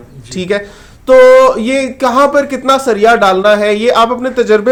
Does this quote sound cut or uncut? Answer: uncut